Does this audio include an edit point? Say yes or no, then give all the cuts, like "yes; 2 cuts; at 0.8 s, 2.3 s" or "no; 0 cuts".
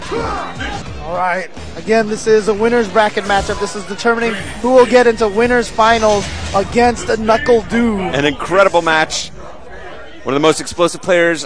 yes; 1 cut; at 9.1 s